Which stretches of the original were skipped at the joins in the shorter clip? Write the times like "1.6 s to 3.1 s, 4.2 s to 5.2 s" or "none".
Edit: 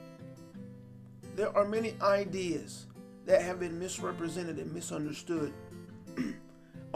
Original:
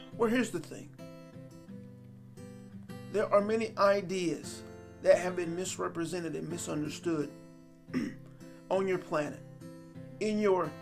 2.5 s to 3.1 s